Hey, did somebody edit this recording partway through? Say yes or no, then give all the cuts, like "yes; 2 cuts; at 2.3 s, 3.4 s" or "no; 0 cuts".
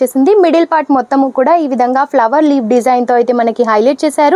no; 0 cuts